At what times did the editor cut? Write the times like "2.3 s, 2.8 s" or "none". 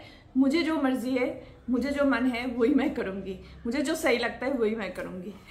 none